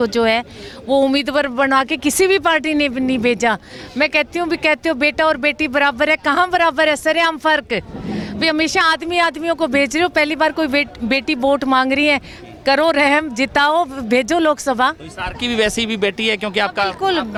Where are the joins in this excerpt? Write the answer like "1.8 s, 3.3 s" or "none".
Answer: none